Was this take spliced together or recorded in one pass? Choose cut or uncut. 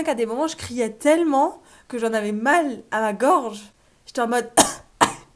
uncut